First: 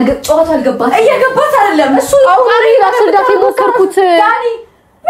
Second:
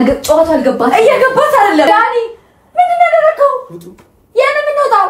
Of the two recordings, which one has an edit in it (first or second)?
second